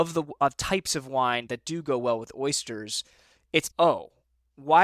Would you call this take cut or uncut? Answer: uncut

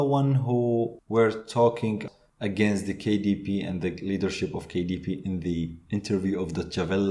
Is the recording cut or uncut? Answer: cut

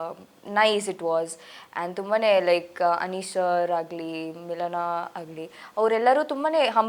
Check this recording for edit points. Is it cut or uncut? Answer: uncut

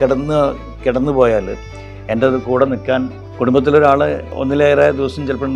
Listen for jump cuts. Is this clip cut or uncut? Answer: cut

